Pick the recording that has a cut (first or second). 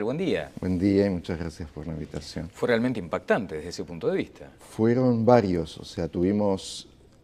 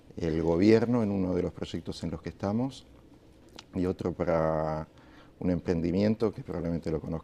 first